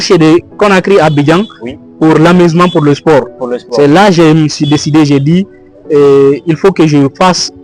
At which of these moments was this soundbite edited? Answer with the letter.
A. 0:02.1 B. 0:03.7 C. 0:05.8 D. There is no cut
D